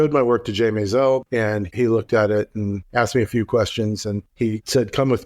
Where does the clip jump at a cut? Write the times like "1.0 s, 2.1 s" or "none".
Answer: 1.2 s, 2.8 s, 4.2 s